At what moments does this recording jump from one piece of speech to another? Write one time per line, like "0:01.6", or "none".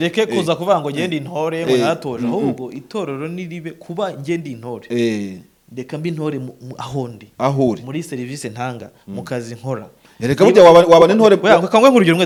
none

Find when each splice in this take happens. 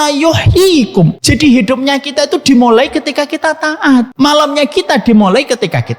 0:01.2
0:04.1

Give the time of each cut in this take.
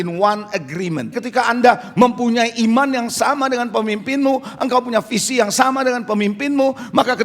0:01.2

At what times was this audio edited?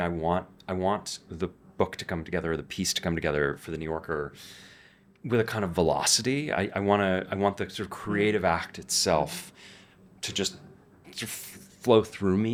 none

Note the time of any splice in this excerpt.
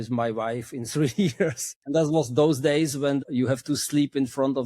0:01.7
0:03.3

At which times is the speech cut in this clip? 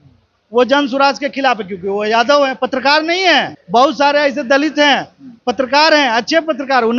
none

